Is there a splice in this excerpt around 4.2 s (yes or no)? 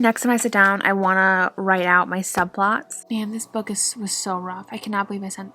no